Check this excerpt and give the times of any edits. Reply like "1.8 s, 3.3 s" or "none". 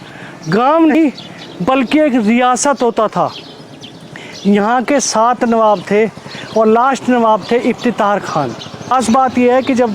0.9 s, 8.9 s